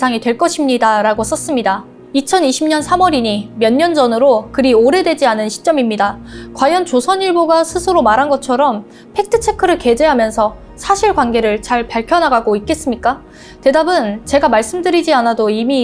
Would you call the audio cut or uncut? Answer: uncut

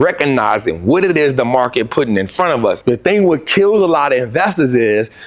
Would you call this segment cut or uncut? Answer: cut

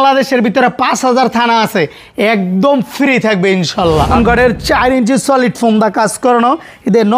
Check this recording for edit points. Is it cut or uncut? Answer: cut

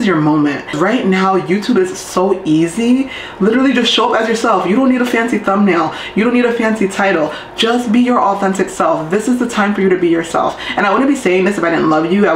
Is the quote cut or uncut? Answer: uncut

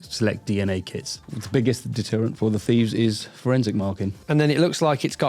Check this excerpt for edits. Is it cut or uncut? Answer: cut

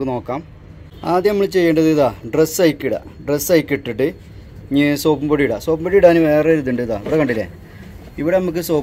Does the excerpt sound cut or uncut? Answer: cut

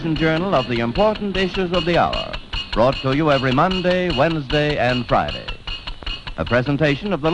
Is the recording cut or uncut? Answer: cut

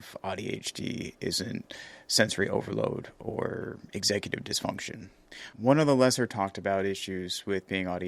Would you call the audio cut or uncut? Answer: uncut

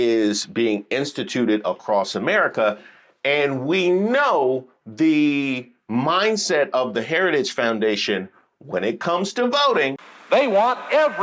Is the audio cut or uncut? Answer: cut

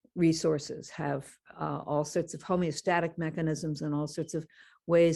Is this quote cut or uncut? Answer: uncut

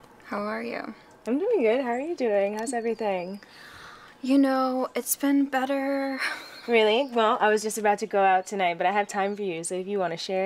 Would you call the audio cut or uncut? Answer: uncut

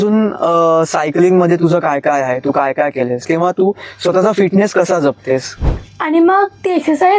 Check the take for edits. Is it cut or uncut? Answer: cut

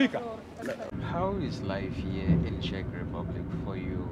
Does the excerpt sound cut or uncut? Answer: cut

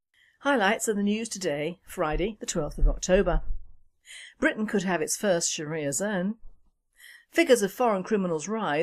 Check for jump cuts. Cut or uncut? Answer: cut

